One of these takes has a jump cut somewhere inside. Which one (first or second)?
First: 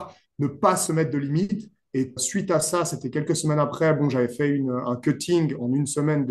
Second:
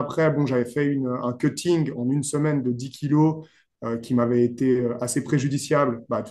first